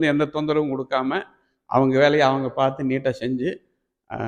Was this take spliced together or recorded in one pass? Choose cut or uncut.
uncut